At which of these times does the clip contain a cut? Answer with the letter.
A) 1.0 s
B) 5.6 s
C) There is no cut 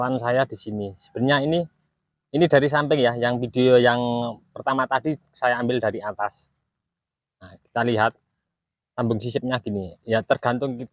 C